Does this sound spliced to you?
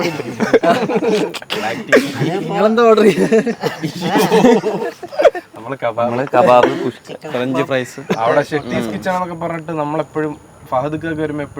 yes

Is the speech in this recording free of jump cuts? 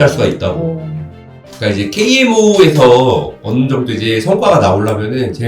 no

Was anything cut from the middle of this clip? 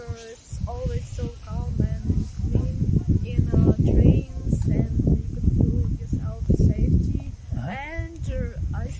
no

